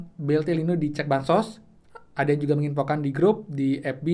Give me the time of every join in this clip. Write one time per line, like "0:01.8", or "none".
none